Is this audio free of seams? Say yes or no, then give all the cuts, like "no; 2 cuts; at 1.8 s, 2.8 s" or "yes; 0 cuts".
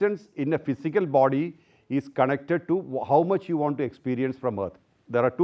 yes; 0 cuts